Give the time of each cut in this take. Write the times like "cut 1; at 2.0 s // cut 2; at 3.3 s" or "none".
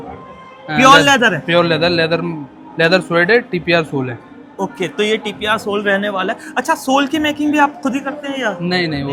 none